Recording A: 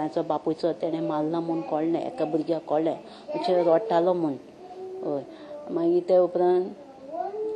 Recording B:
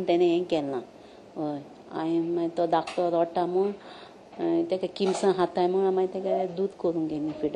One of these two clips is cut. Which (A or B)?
B